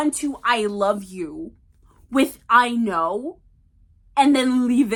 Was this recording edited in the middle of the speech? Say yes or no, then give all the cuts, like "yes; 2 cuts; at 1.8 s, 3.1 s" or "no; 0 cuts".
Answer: no; 0 cuts